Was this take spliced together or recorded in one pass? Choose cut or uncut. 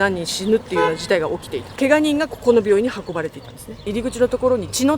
cut